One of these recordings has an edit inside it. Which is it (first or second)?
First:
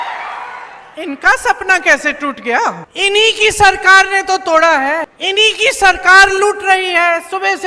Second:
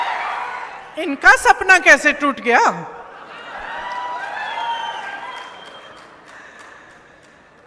first